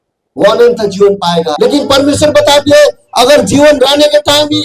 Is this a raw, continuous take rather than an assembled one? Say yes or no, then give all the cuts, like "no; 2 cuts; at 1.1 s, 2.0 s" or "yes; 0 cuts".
no; 1 cut; at 1.5 s